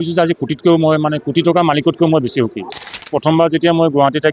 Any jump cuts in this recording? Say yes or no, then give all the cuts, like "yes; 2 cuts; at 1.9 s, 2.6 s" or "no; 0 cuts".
yes; 1 cut; at 3.1 s